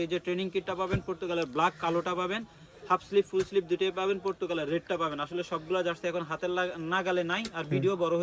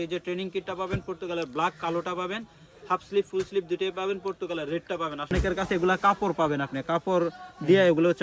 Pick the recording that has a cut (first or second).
second